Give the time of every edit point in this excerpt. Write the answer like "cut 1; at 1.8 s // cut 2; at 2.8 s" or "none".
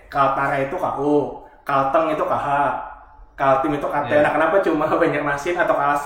none